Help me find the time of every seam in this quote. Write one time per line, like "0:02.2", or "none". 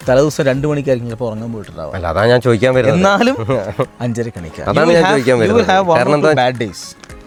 none